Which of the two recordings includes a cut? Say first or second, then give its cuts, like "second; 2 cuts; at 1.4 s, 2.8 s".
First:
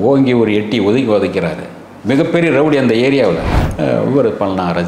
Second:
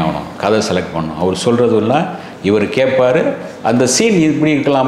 first; 1 cut; at 3.5 s